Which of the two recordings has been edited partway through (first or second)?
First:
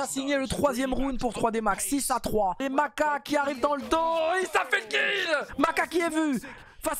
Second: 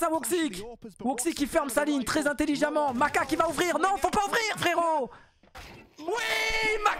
first